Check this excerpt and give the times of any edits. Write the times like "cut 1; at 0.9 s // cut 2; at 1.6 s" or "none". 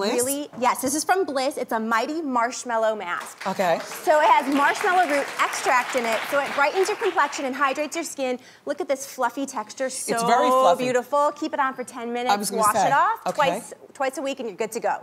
cut 1; at 13.2 s